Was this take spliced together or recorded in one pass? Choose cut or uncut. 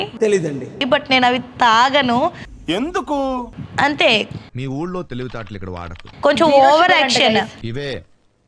cut